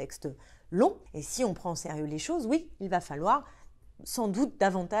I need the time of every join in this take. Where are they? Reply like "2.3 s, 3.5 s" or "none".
1.1 s